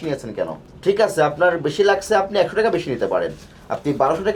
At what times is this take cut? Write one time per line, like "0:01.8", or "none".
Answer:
none